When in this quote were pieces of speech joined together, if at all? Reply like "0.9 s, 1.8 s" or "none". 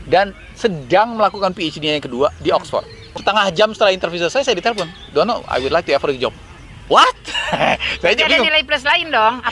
3.0 s